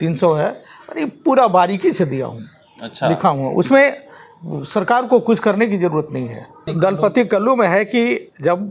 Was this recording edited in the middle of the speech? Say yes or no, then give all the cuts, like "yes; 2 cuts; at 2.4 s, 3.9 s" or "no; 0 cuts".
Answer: yes; 1 cut; at 6.6 s